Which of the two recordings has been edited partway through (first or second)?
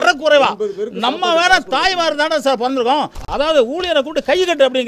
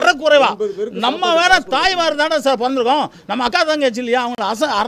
first